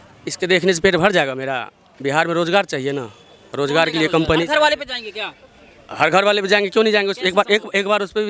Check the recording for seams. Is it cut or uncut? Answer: uncut